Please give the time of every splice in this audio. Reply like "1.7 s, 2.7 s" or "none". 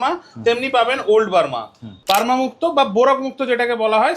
1.9 s